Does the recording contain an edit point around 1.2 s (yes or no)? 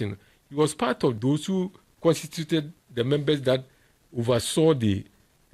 yes